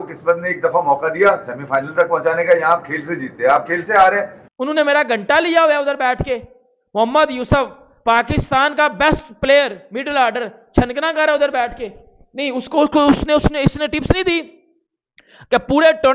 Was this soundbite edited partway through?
yes; 1 cut; at 4.4 s

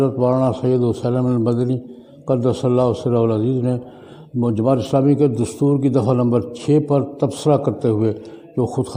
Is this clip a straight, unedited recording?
yes; 0 cuts

